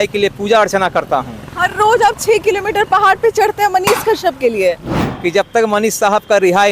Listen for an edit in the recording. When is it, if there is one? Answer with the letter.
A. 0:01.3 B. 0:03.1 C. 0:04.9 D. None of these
C